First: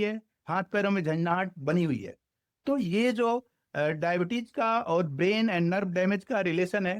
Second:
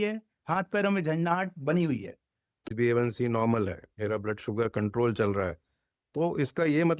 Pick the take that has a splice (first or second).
second